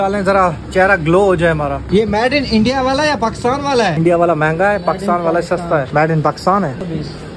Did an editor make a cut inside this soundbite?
no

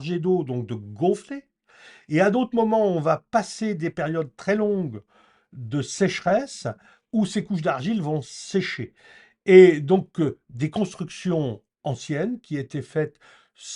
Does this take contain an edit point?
no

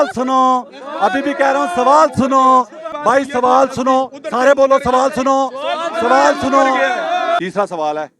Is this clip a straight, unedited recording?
no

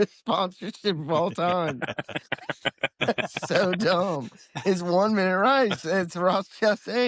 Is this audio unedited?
yes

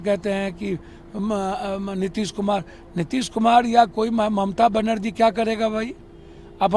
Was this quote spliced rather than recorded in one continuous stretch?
no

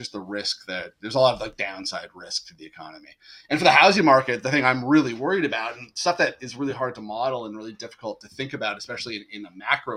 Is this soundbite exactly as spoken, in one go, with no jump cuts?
yes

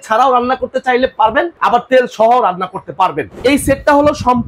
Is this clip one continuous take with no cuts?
no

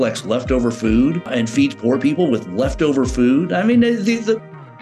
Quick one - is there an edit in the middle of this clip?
yes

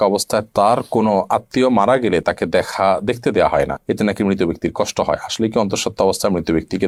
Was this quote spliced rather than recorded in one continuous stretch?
no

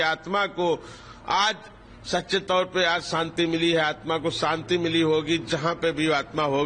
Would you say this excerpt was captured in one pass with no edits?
yes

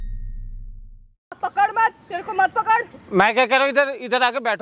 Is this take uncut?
no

